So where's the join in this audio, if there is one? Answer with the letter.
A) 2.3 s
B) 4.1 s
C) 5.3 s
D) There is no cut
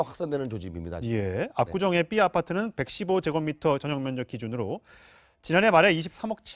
A